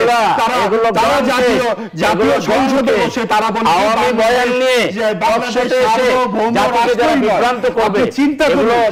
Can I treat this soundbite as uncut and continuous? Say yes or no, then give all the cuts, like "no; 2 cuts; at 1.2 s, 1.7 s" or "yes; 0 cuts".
yes; 0 cuts